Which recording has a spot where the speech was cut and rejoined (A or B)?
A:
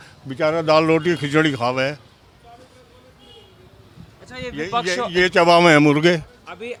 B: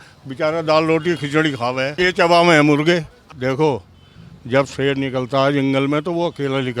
B